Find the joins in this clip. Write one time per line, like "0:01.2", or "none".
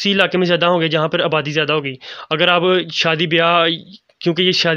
none